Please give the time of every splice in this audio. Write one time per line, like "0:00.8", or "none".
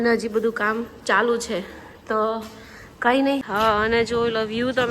0:03.5